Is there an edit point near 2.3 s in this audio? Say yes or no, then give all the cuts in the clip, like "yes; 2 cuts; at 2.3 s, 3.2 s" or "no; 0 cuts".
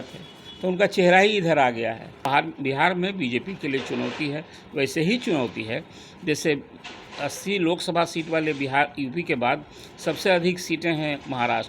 yes; 1 cut; at 2.3 s